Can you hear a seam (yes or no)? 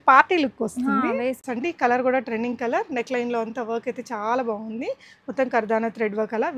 yes